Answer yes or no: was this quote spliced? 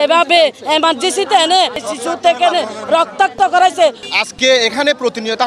yes